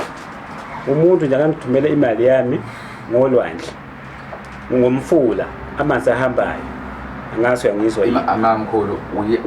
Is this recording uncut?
yes; 0 cuts

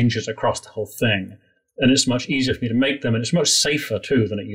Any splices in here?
no; 0 cuts

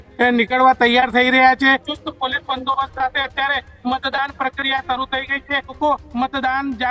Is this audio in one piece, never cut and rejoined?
no; 2 cuts; at 1.9 s, 5.8 s

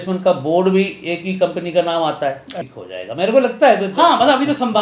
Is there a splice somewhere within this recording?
yes; 1 cut; at 2.5 s

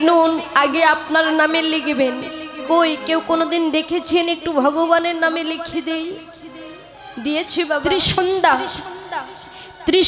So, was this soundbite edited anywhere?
yes; 1 cut; at 7.9 s

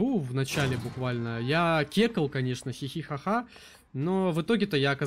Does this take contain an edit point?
no; 0 cuts

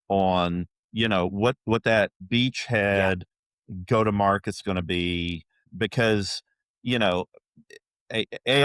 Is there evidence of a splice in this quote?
yes; 2 cuts; at 2.2 s, 5.7 s

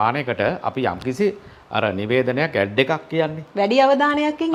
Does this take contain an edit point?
no; 0 cuts

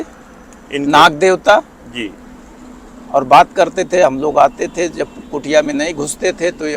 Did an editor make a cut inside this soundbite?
no; 0 cuts

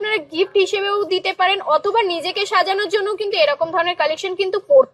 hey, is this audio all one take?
yes; 0 cuts

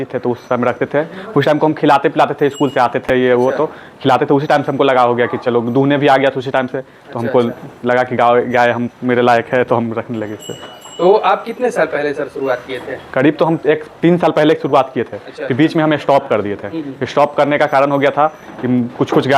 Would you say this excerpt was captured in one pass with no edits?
yes; 0 cuts

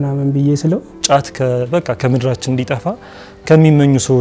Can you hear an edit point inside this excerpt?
yes; 1 cut; at 0.9 s

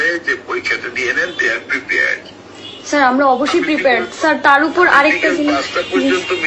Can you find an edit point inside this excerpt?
no; 0 cuts

